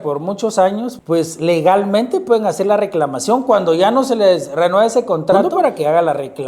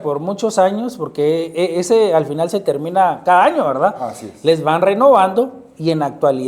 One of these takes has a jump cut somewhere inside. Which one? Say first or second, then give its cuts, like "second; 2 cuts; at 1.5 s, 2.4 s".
first; 2 cuts; at 0.9 s, 5.5 s